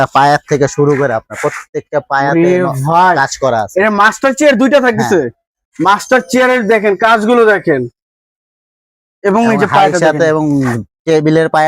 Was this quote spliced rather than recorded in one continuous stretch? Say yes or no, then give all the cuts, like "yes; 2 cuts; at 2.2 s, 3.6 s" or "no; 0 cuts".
no; 0 cuts